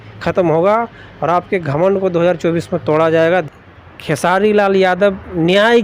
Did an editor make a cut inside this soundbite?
yes; 1 cut; at 3.4 s

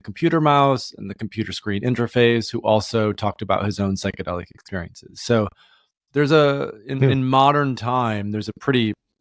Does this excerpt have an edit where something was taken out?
no; 0 cuts

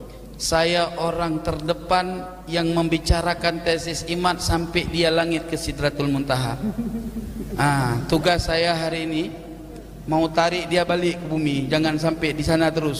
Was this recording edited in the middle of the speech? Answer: no; 0 cuts

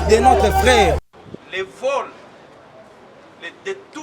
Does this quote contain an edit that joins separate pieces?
yes; 1 cut; at 1.0 s

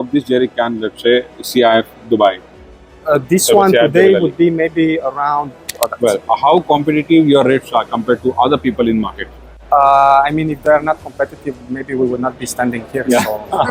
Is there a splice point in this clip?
yes; 1 cut; at 5.7 s

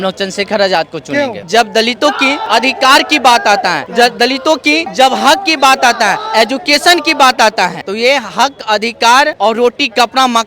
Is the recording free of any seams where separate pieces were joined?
no; 6 cuts; at 1.4 s, 2.4 s, 3.8 s, 4.9 s, 7.8 s, 9.3 s

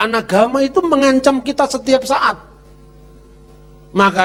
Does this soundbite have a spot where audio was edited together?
no; 0 cuts

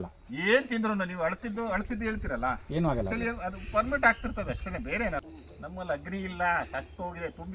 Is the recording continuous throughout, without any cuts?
no; 1 cut; at 5.2 s

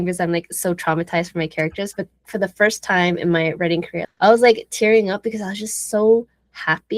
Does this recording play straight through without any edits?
no; 2 cuts; at 2.3 s, 4.0 s

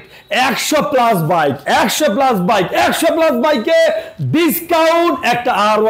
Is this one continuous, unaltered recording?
yes; 0 cuts

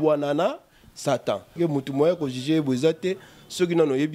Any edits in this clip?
yes; 1 cut; at 1.5 s

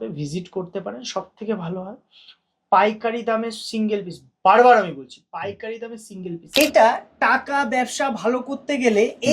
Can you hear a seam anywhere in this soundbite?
yes; 1 cut; at 6.5 s

